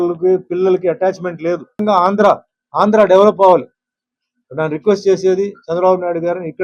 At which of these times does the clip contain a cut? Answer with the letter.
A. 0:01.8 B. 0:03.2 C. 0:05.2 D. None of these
A